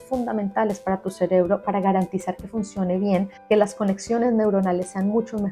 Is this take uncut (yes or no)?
no